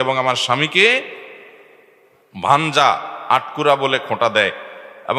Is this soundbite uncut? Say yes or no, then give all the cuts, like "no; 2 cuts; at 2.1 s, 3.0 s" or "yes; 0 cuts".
yes; 0 cuts